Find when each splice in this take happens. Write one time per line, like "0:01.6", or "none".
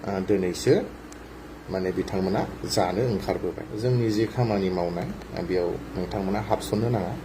0:03.7